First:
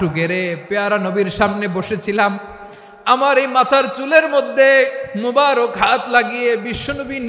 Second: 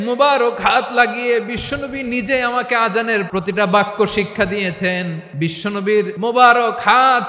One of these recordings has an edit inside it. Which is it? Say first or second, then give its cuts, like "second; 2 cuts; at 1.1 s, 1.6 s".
second; 3 cuts; at 3.3 s, 5.2 s, 6.1 s